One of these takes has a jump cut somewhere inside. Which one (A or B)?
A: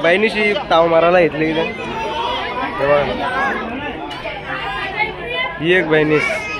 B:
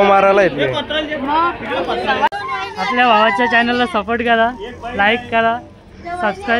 B